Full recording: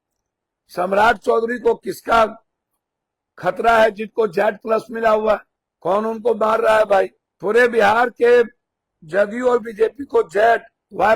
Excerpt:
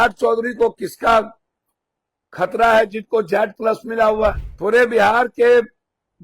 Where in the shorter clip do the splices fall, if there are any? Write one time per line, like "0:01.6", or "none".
0:04.5